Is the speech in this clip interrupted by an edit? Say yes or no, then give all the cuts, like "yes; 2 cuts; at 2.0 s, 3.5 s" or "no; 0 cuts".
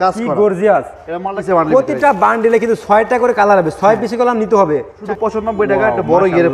yes; 2 cuts; at 1.4 s, 5.0 s